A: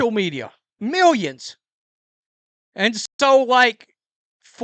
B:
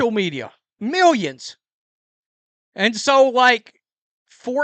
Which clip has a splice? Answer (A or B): B